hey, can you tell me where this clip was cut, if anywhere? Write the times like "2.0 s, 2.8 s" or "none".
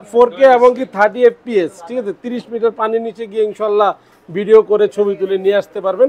none